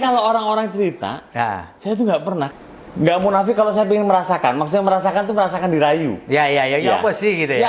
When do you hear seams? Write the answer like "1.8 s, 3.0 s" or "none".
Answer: 2.5 s